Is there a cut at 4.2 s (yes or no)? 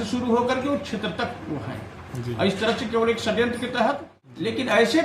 yes